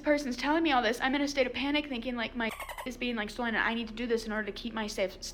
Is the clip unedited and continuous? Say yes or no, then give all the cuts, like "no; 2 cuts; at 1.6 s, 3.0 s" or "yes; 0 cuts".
yes; 0 cuts